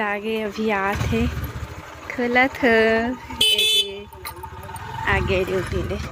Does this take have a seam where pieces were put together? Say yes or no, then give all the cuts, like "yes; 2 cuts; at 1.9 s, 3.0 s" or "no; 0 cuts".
no; 0 cuts